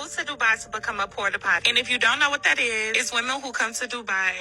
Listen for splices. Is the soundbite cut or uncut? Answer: uncut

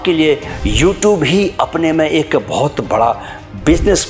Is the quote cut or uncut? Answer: uncut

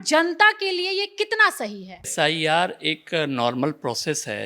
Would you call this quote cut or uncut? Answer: cut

